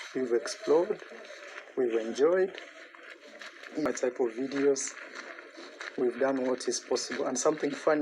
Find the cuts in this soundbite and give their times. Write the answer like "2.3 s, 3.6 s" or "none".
3.9 s